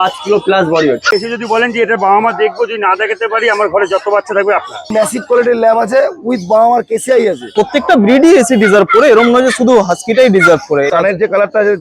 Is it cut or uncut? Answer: cut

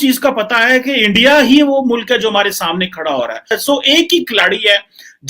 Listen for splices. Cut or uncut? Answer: cut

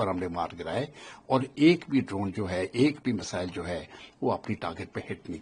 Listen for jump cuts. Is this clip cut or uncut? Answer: uncut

